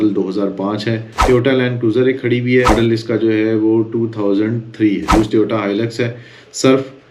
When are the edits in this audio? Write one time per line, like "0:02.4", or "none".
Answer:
0:01.1
0:02.7
0:05.1